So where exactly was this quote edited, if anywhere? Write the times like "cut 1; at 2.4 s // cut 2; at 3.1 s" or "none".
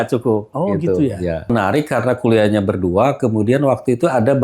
cut 1; at 1.5 s